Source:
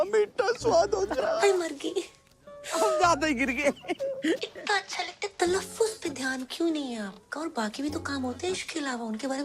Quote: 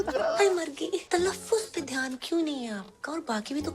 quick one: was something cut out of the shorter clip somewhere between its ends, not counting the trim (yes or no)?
yes